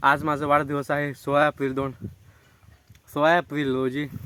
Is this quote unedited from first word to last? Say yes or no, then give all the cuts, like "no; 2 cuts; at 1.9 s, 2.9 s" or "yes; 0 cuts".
yes; 0 cuts